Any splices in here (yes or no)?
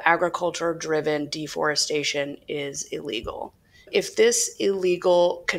yes